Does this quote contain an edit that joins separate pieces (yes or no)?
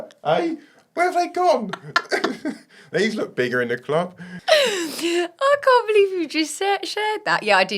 yes